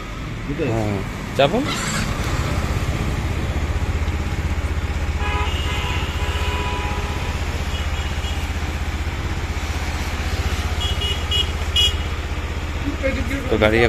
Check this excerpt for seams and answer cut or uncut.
uncut